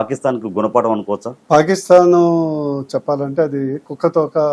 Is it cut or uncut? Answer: cut